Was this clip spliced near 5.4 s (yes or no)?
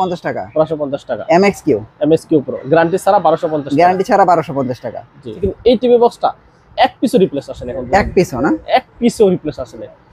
yes